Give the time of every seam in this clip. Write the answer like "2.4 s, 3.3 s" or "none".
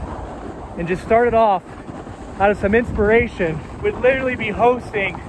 3.7 s